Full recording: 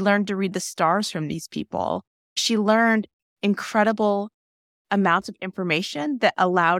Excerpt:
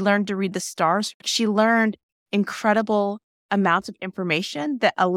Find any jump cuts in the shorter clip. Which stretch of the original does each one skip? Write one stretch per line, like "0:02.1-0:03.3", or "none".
0:01.1-0:02.2
0:04.4-0:04.7